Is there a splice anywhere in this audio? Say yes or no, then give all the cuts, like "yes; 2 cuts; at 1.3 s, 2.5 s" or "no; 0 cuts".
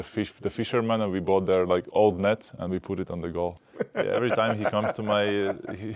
yes; 2 cuts; at 2.5 s, 3.6 s